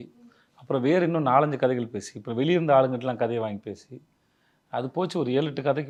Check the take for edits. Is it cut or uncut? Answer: uncut